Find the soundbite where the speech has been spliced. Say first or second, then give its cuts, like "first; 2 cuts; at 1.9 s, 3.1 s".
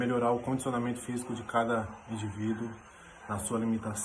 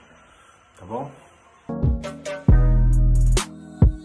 second; 1 cut; at 1.7 s